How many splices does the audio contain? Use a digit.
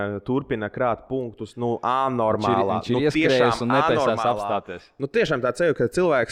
0